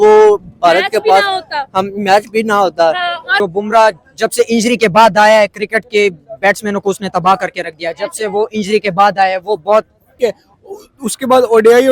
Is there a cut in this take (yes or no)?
yes